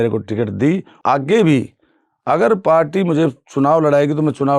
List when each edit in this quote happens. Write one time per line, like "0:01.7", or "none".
0:01.0